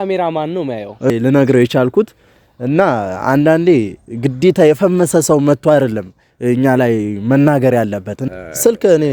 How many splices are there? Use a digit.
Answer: 2